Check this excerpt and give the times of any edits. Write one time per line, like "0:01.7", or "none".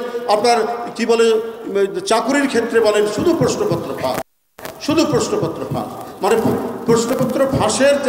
none